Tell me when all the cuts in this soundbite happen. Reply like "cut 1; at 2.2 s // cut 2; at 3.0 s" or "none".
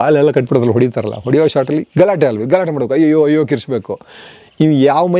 none